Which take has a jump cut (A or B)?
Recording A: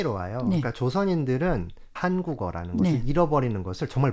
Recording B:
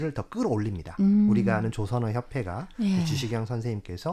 A